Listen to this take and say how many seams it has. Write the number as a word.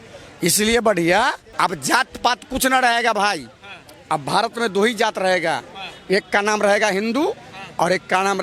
one